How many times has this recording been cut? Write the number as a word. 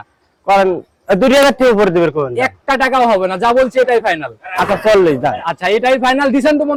zero